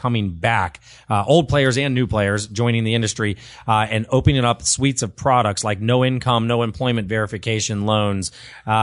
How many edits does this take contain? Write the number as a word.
zero